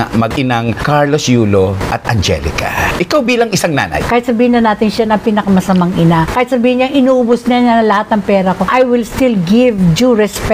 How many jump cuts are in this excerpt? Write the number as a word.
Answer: one